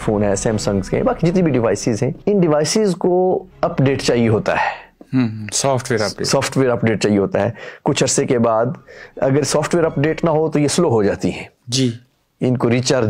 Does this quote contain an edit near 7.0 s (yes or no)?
no